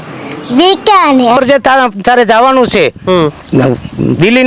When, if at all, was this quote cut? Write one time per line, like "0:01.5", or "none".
0:01.4